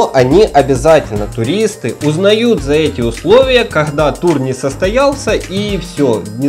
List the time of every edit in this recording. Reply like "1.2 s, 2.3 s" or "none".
none

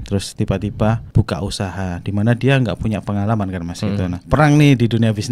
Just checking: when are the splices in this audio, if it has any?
1.0 s, 4.2 s

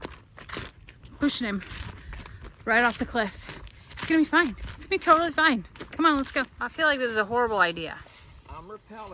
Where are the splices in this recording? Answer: 6.6 s

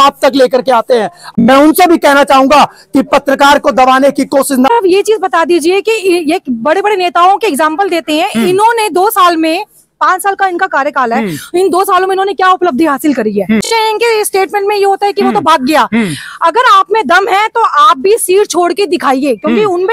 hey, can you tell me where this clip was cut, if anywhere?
1.3 s, 4.7 s, 13.7 s

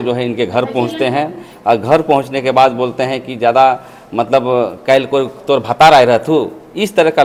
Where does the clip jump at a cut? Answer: none

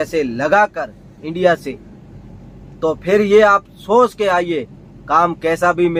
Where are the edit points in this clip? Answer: none

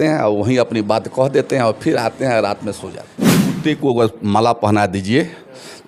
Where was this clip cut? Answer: 3.5 s

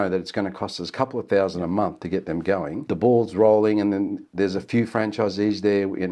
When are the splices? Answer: 2.8 s

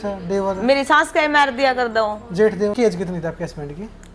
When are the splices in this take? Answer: 2.8 s

